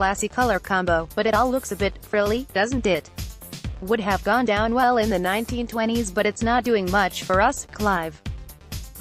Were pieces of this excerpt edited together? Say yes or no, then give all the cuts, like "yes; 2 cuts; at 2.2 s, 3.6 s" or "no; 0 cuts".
no; 0 cuts